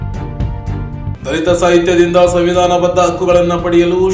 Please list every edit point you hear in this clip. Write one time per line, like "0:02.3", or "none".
0:01.1